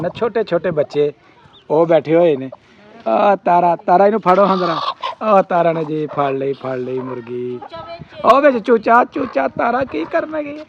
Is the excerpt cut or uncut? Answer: uncut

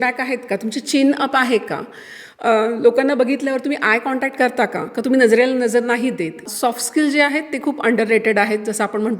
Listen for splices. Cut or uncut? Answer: cut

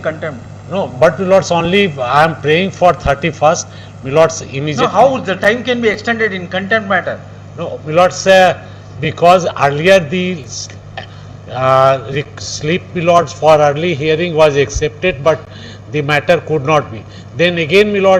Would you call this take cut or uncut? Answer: uncut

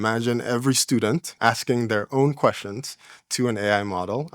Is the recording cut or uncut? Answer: cut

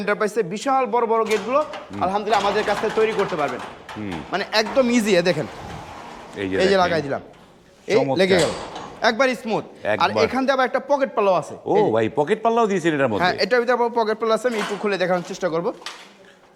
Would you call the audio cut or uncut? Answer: uncut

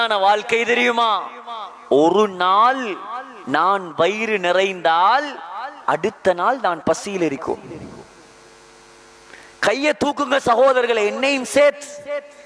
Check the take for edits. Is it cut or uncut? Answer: uncut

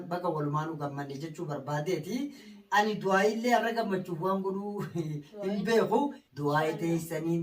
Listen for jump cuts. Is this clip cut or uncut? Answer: cut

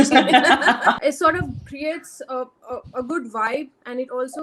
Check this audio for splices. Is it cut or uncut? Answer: cut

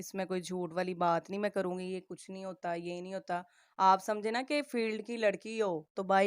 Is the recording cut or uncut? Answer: uncut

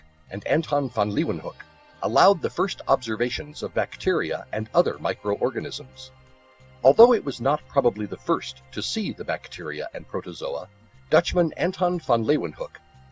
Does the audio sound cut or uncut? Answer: cut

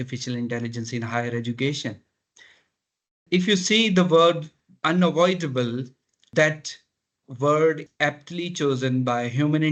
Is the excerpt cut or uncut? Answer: uncut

